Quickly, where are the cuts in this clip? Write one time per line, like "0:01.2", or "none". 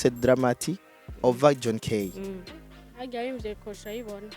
0:02.5